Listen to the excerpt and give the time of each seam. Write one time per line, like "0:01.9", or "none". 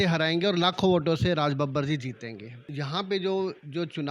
0:02.6